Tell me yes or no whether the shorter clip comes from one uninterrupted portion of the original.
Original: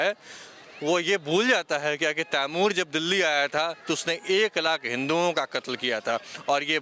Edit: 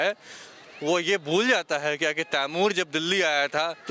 yes